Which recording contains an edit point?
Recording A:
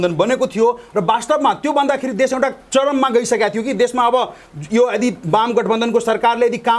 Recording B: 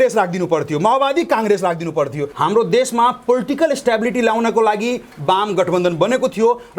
B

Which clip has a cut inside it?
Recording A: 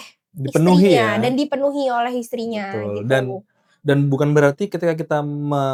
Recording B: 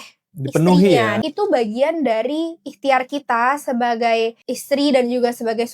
B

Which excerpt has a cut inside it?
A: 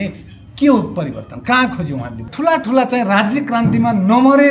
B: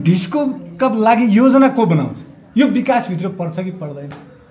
A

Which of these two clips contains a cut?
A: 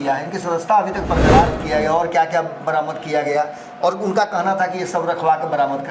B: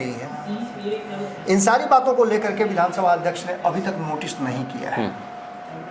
A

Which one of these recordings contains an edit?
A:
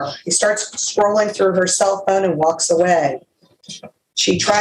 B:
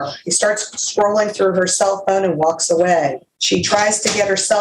B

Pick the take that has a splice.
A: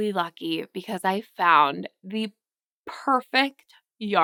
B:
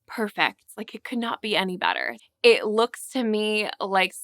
B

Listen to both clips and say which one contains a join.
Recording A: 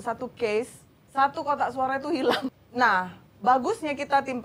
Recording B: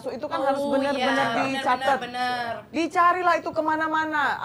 A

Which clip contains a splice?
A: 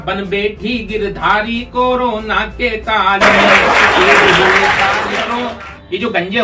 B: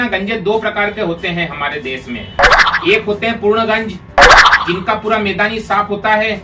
A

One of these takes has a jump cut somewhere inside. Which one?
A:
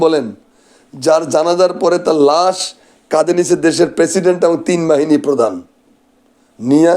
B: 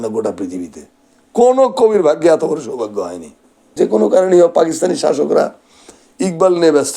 B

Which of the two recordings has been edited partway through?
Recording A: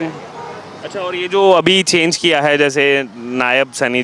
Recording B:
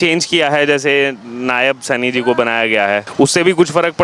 B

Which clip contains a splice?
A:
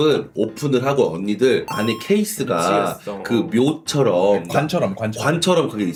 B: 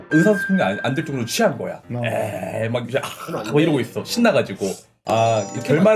B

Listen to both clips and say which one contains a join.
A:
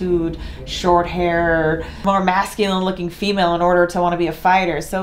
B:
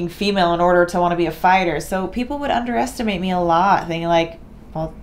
A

